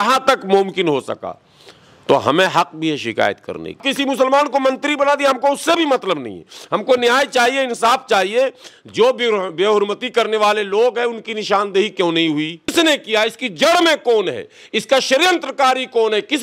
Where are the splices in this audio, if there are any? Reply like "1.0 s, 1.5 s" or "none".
3.8 s, 12.7 s